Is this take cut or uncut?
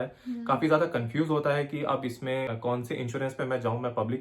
cut